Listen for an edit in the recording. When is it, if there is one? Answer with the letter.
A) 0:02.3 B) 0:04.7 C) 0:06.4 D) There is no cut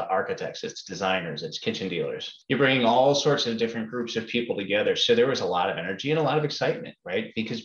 A